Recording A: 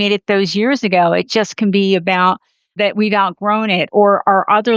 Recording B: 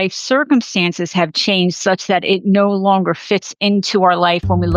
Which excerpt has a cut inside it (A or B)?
A